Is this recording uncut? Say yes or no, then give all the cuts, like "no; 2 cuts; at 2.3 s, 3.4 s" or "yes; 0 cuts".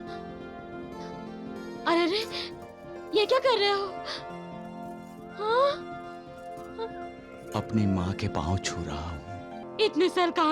no; 1 cut; at 9.6 s